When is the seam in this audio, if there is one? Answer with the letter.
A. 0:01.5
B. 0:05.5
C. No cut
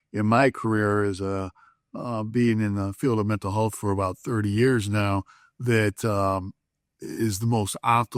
C